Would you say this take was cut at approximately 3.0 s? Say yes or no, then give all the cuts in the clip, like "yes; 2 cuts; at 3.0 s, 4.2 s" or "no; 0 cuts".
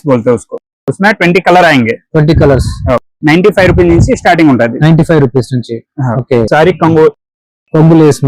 no; 1 cut; at 6.5 s